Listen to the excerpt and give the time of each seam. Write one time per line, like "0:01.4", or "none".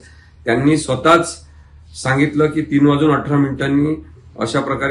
none